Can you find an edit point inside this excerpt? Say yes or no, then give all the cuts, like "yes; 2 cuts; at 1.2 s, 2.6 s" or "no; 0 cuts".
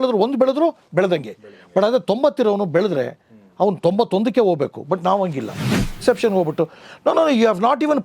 yes; 1 cut; at 5.9 s